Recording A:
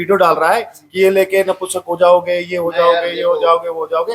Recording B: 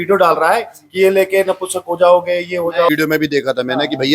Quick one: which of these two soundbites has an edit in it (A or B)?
B